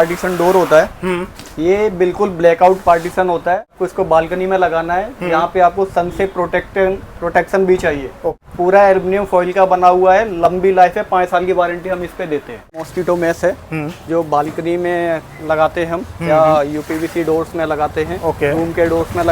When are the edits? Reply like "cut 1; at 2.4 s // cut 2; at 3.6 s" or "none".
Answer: cut 1; at 3.7 s // cut 2; at 8.3 s // cut 3; at 12.7 s

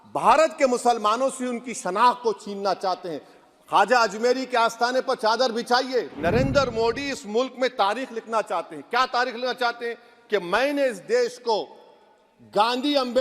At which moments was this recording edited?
cut 1; at 6.1 s

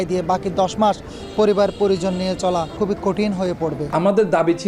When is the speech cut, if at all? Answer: cut 1; at 2.8 s // cut 2; at 3.9 s

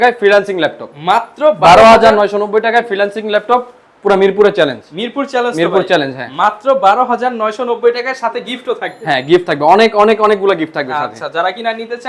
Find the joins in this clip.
none

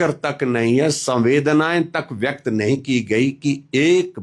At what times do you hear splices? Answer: none

